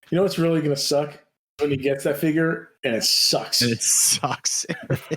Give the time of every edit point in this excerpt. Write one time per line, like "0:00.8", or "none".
0:01.6
0:02.7